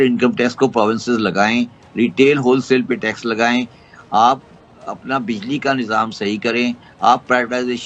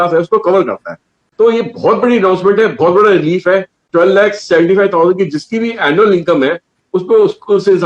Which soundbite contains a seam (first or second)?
second